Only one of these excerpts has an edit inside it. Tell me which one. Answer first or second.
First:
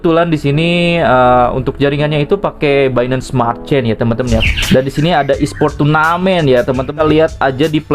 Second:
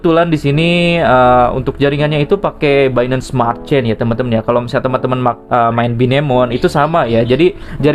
first